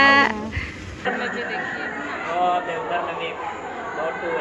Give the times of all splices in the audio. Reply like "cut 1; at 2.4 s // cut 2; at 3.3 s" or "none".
cut 1; at 1.1 s